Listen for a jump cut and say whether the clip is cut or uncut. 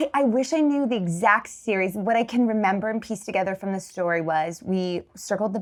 uncut